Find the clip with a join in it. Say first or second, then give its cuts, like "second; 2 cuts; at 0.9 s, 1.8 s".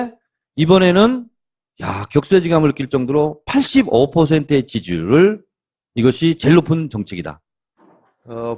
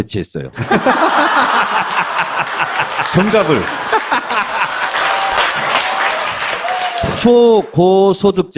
second; 1 cut; at 4.8 s